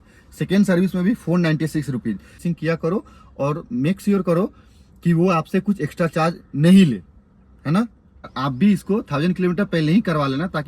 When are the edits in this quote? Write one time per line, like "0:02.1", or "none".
0:02.4
0:08.3